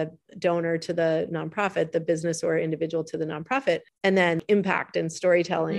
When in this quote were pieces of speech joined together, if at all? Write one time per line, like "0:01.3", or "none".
0:04.3